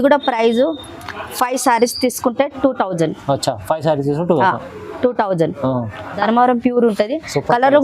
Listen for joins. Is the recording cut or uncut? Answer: cut